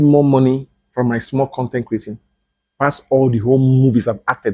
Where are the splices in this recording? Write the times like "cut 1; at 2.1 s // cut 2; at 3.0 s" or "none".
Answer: none